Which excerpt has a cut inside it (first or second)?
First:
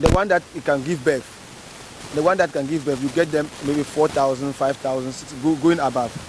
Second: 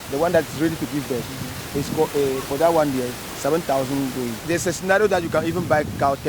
second